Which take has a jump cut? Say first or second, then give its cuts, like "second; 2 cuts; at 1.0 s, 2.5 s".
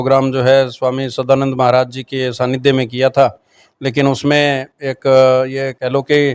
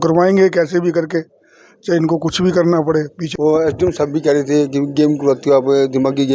second; 1 cut; at 3.2 s